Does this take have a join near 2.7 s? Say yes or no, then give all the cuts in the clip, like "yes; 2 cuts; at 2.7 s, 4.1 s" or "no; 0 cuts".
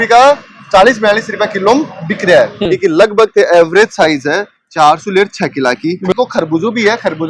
yes; 2 cuts; at 2.7 s, 6.1 s